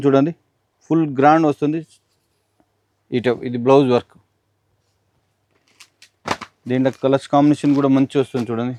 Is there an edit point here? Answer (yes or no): no